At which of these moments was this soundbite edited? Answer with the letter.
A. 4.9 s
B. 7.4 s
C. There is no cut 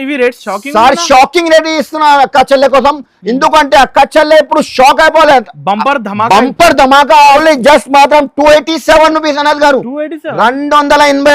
B